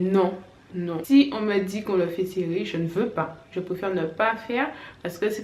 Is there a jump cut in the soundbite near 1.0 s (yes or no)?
yes